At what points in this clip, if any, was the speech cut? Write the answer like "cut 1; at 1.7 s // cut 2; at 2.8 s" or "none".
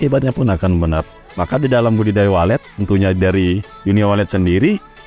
cut 1; at 1.2 s